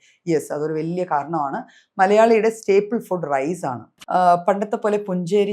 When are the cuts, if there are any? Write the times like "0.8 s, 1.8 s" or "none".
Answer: 3.9 s